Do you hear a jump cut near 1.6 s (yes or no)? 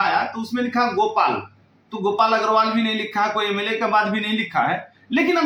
no